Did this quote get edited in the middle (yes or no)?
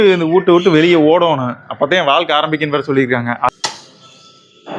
yes